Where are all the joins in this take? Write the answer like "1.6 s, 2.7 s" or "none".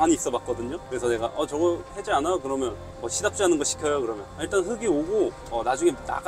none